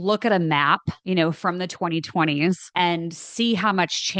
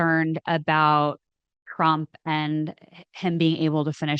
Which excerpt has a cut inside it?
first; 2 cuts; at 0.9 s, 2.7 s

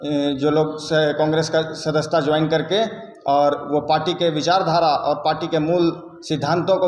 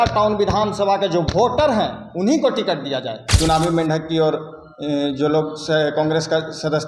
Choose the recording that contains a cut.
second; 1 cut; at 3.3 s

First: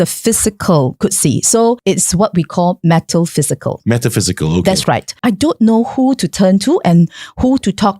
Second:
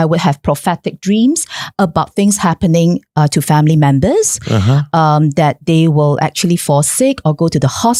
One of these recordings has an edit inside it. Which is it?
first; 2 cuts; at 1.8 s, 5.1 s

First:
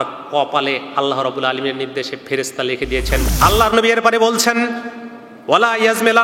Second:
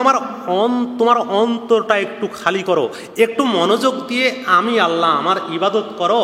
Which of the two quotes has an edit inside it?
first; 1 cut; at 3.3 s

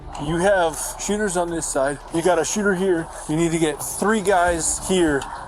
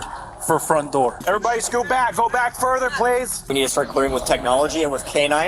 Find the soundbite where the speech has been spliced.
second; 2 cuts; at 1.2 s, 3.4 s

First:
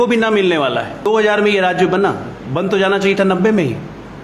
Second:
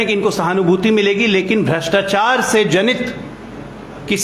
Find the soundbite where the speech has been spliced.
first; 1 cut; at 1.0 s

